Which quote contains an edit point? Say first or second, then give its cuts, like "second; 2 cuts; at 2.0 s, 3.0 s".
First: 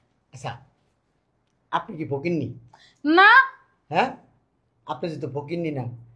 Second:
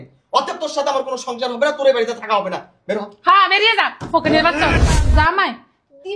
second; 1 cut; at 4.8 s